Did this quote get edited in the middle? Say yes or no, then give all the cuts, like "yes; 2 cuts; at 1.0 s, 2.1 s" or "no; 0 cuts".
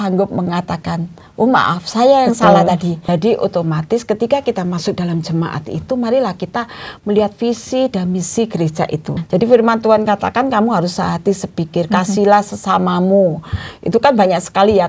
yes; 2 cuts; at 3.0 s, 9.2 s